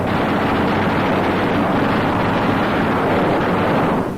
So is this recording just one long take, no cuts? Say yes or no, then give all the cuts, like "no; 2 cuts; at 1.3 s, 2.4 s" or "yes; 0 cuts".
yes; 0 cuts